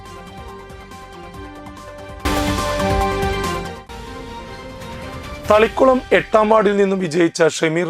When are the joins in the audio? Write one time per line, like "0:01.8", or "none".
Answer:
0:01.2